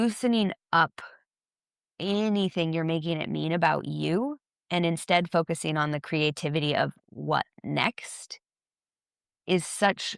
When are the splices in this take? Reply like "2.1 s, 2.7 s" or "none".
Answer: none